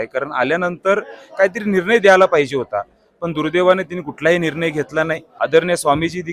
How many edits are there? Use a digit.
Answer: 1